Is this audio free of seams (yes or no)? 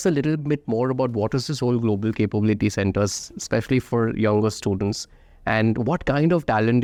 yes